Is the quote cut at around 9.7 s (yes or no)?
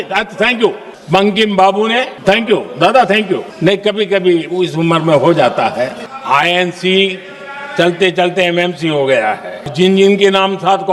yes